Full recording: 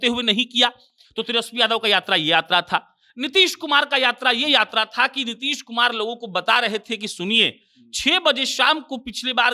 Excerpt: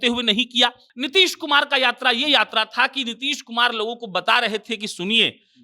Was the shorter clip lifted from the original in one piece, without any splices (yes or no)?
no